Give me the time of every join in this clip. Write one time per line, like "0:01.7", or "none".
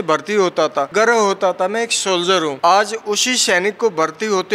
0:00.9
0:02.5